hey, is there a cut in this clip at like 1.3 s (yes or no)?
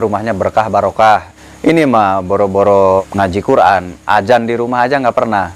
yes